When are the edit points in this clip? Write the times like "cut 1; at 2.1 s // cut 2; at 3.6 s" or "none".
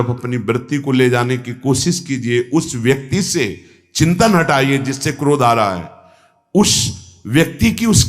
none